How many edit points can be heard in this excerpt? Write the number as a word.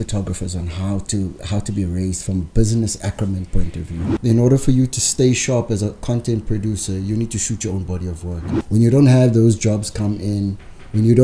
two